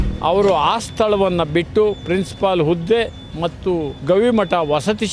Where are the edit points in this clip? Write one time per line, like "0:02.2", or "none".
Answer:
0:03.9